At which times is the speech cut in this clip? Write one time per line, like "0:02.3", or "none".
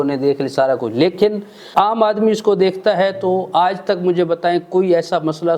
0:01.7